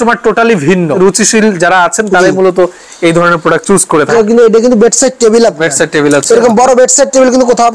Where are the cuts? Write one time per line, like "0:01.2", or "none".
0:01.0
0:04.1